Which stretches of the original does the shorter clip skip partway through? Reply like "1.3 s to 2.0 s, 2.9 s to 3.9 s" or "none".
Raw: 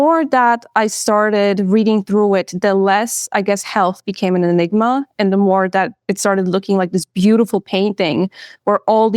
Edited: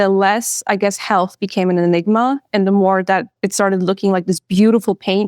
none